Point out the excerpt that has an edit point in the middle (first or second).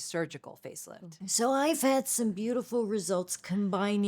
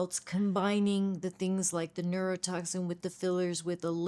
first